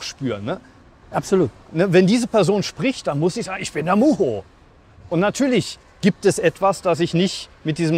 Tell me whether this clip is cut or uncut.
uncut